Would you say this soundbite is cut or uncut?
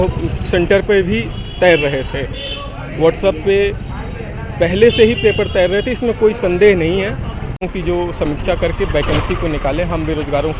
cut